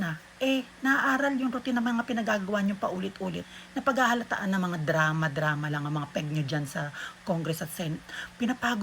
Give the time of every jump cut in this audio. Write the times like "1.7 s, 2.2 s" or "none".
3.5 s

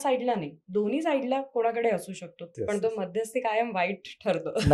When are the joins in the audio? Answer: 2.5 s

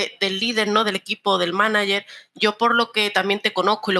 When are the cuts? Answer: none

